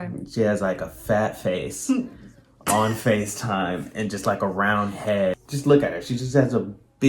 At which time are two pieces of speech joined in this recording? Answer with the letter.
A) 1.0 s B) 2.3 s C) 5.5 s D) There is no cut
C